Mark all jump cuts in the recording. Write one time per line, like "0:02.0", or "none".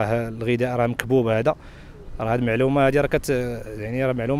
none